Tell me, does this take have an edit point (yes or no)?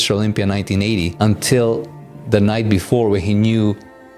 yes